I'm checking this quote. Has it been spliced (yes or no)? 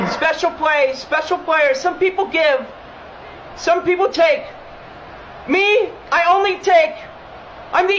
no